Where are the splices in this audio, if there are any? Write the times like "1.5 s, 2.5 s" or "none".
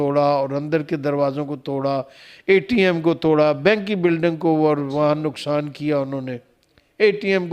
none